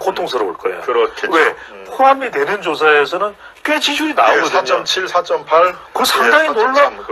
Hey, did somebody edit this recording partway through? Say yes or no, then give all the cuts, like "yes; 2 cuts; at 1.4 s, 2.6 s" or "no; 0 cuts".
no; 0 cuts